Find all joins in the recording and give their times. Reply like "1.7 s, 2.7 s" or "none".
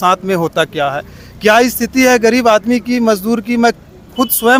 none